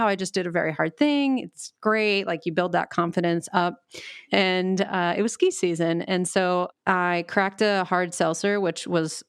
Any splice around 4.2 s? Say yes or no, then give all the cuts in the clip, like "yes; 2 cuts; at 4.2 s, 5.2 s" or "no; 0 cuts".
yes; 2 cuts; at 4.2 s, 6.7 s